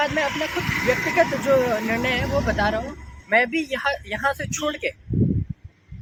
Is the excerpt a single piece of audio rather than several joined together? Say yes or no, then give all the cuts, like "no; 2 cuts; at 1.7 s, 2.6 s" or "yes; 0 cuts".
yes; 0 cuts